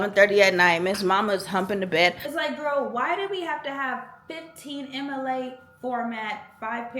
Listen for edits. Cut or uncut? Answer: cut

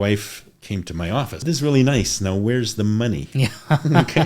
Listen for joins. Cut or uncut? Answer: cut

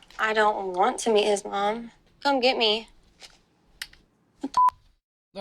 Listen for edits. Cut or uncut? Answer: uncut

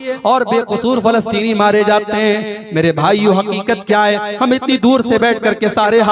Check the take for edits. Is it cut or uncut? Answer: uncut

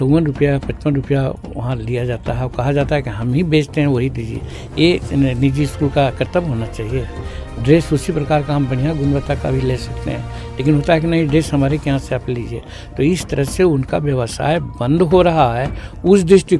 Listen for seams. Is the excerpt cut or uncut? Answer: uncut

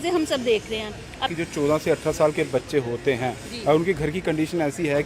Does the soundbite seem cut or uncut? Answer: cut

